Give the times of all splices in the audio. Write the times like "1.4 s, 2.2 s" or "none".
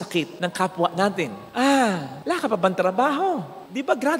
1.4 s